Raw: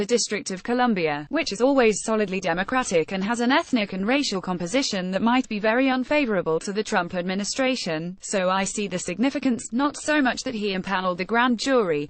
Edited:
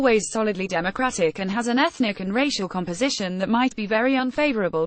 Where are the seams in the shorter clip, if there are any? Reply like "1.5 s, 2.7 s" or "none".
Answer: none